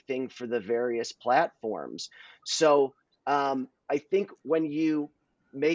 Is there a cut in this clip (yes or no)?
no